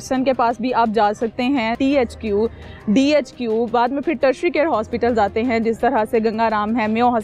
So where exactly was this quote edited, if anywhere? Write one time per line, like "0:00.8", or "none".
0:01.7